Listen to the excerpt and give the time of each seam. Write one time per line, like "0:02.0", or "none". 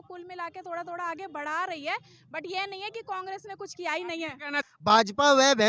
0:04.6